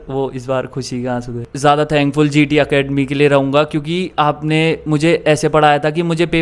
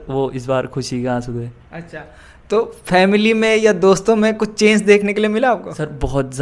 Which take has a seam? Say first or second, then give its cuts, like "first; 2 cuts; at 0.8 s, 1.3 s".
first; 1 cut; at 1.5 s